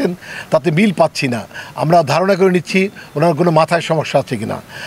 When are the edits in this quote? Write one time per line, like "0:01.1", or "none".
none